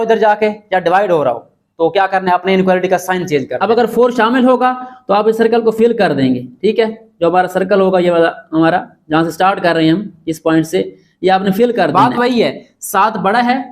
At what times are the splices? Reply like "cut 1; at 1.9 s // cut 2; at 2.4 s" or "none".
cut 1; at 3.6 s // cut 2; at 11.9 s